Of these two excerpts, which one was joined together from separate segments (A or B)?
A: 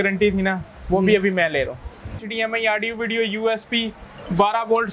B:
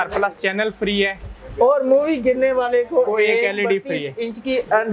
A